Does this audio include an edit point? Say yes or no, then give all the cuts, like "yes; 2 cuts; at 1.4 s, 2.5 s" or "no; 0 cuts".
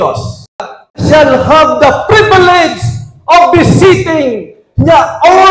yes; 1 cut; at 1.0 s